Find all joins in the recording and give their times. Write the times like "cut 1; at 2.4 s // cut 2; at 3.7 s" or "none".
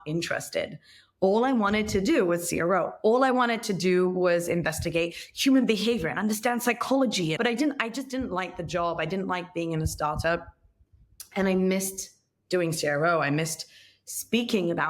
cut 1; at 7.4 s